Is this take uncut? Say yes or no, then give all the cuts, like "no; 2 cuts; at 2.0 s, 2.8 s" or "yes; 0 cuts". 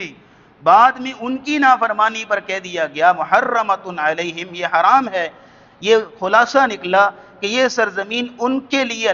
yes; 0 cuts